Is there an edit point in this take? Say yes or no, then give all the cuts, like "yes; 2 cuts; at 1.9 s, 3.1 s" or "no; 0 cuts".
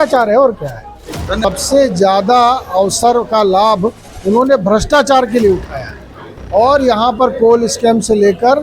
yes; 1 cut; at 1.4 s